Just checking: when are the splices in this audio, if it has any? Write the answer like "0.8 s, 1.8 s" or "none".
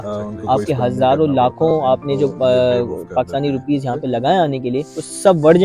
none